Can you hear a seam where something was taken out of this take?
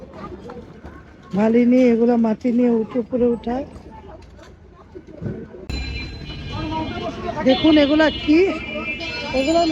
yes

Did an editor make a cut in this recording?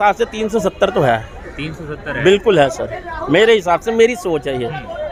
no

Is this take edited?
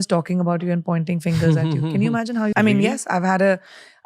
yes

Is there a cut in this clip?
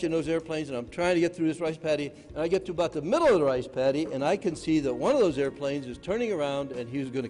yes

